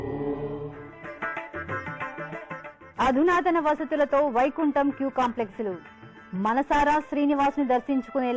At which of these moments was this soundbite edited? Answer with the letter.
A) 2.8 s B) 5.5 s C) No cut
A